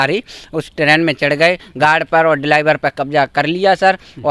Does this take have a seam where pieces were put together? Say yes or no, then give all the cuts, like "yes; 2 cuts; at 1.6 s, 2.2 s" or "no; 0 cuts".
no; 0 cuts